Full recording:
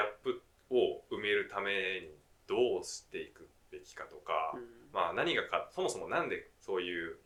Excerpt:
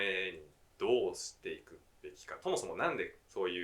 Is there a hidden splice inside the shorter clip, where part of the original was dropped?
yes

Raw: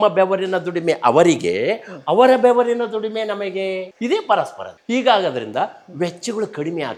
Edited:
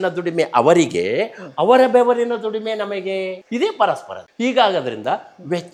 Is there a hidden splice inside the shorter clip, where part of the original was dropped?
no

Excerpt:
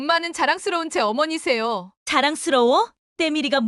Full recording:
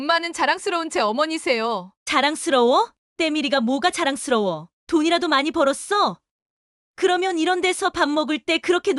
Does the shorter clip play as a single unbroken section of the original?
yes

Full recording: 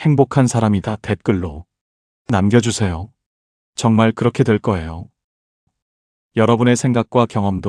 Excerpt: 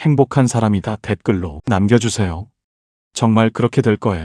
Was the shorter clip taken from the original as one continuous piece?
no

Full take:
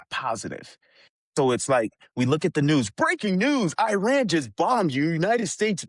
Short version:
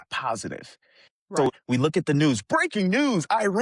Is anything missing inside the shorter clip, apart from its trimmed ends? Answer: yes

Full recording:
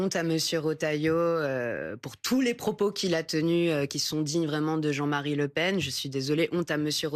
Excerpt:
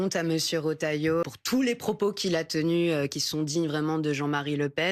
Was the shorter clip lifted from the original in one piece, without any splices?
no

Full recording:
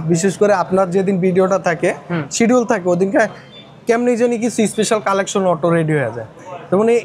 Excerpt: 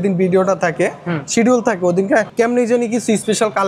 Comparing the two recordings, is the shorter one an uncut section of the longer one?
no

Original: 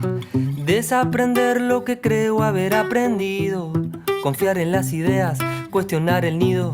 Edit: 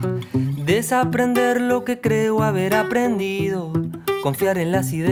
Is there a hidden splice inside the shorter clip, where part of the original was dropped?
no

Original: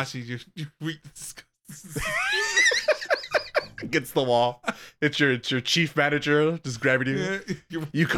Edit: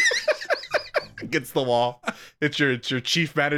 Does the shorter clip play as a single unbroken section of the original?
yes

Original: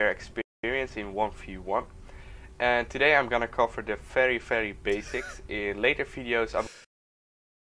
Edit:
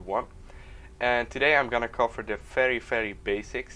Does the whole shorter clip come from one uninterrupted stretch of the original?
yes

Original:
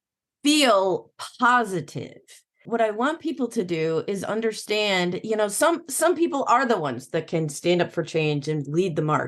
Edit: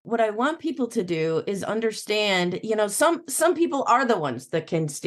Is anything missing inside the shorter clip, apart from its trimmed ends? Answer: no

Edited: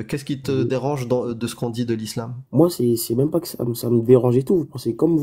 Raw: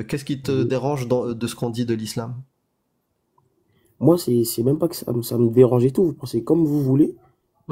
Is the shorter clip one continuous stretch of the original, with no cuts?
no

